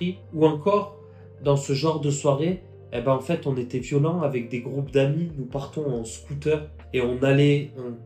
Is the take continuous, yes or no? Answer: yes